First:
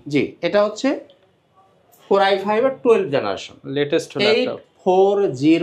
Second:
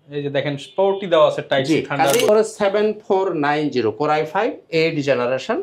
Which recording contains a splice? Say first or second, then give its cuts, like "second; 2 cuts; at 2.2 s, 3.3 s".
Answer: second; 1 cut; at 2.3 s